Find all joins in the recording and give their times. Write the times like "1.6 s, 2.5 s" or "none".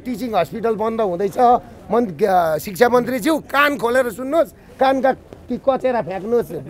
none